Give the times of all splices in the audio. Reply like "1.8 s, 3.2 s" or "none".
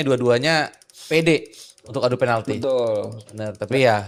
none